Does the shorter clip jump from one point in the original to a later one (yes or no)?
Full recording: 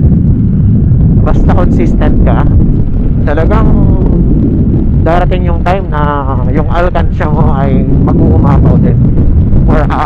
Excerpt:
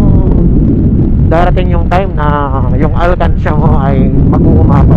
no